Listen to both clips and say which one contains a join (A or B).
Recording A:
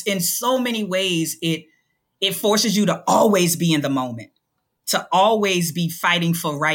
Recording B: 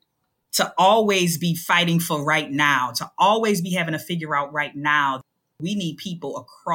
B